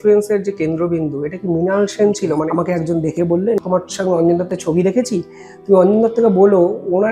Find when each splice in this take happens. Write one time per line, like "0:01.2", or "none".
0:02.5
0:03.6